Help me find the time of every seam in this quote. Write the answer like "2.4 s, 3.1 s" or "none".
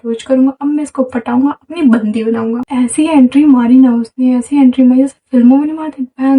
2.6 s